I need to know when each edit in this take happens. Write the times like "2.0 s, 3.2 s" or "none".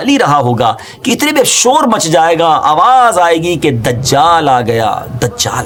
none